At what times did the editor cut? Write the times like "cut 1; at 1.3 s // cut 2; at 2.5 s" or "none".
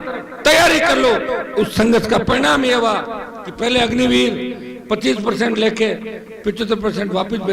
none

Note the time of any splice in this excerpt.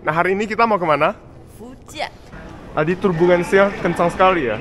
cut 1; at 2.3 s

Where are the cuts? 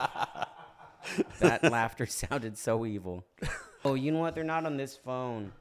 cut 1; at 3.9 s

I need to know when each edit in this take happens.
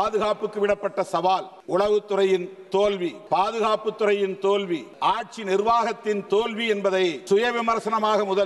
cut 1; at 1.5 s // cut 2; at 3.2 s // cut 3; at 4.9 s // cut 4; at 7.2 s

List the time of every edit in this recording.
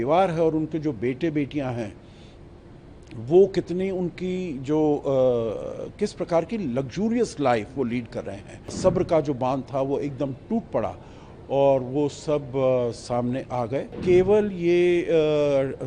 cut 1; at 8.8 s // cut 2; at 14.0 s

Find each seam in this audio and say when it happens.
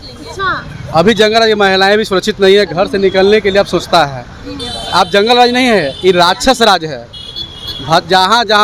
none

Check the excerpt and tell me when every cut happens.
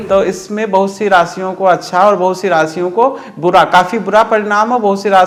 none

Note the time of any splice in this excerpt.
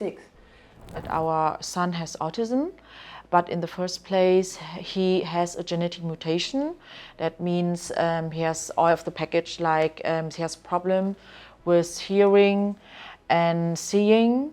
cut 1; at 1.0 s // cut 2; at 2.2 s

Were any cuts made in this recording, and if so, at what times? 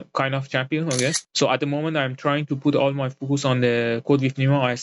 cut 1; at 1.3 s

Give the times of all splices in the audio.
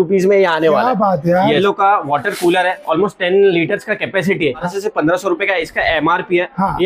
cut 1; at 1.6 s // cut 2; at 4.6 s

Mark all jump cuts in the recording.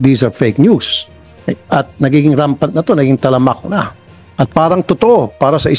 none

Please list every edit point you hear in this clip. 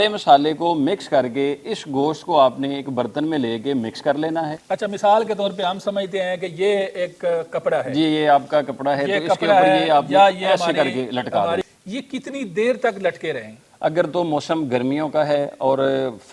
cut 1; at 4.5 s // cut 2; at 11.6 s

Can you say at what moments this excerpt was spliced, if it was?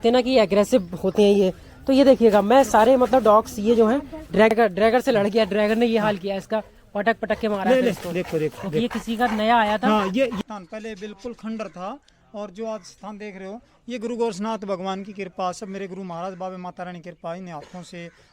cut 1; at 4.5 s // cut 2; at 10.4 s

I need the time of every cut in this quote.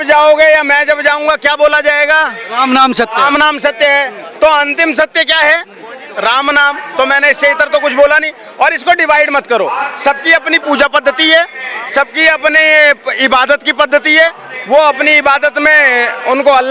none

